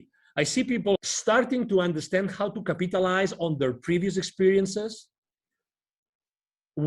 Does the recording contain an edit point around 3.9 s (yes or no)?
no